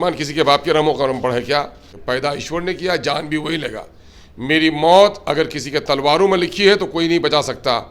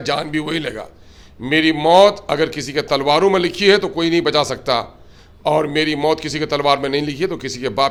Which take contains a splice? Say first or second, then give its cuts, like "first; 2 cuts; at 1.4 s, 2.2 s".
first; 1 cut; at 1.9 s